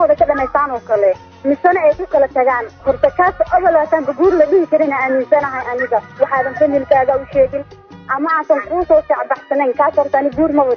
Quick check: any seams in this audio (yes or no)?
no